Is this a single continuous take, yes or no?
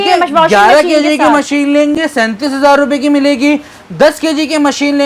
yes